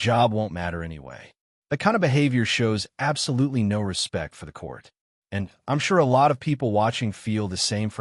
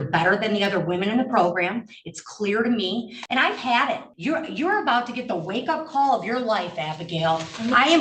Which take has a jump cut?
second; 2 cuts; at 3.2 s, 4.1 s

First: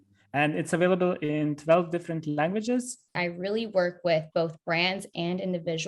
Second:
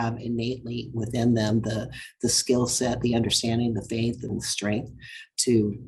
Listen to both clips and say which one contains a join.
first; 1 cut; at 3.1 s

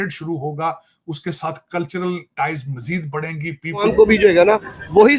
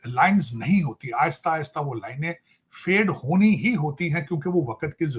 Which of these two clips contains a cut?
first; 1 cut; at 3.8 s

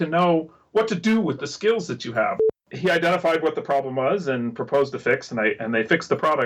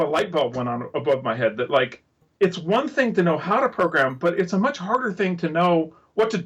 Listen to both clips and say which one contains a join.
first; 1 cut; at 2.4 s

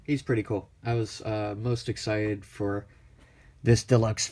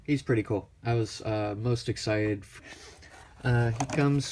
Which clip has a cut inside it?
first; 1 cut; at 2.5 s

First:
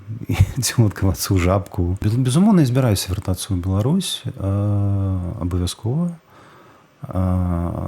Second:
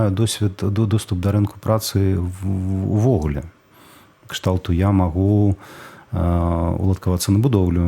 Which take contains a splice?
first; 1 cut; at 2.0 s

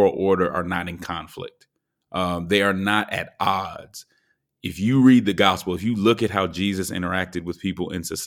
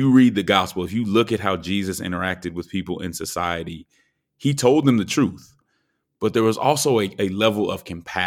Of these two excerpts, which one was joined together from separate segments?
second; 1 cut; at 5.5 s

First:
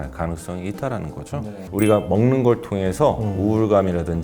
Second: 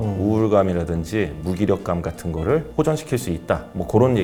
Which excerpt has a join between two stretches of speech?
first; 1 cut; at 1.7 s

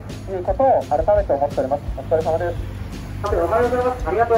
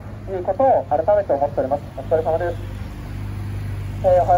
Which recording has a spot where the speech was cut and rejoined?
first; 1 cut; at 3.3 s

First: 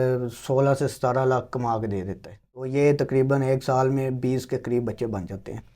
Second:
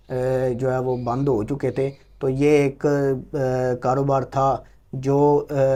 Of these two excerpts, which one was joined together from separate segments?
first; 1 cut; at 2.4 s

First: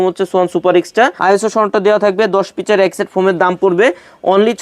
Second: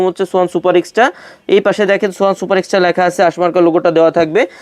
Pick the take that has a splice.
first; 1 cut; at 1.2 s

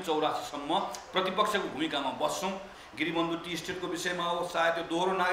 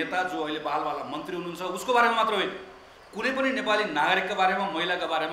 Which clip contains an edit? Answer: first; 1 cut; at 2.8 s

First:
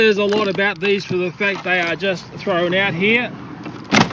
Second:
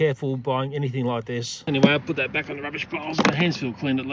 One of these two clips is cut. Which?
second; 1 cut; at 1.6 s

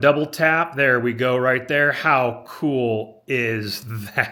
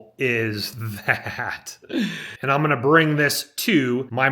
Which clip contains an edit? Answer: second; 1 cut; at 2.4 s

